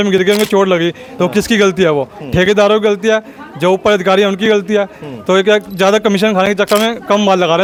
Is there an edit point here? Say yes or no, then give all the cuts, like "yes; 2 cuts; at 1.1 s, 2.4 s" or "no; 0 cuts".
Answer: no; 0 cuts